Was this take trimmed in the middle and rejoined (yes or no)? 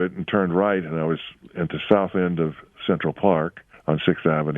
yes